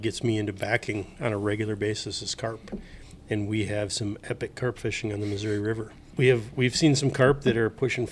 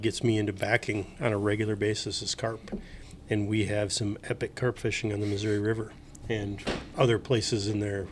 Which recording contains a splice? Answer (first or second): first